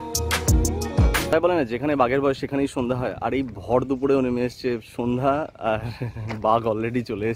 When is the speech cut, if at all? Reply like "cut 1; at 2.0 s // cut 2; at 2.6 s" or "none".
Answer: cut 1; at 1.3 s